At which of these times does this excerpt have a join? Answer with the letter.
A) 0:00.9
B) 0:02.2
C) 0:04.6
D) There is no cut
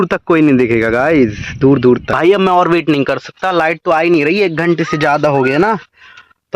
B